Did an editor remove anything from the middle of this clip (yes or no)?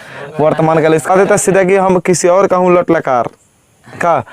yes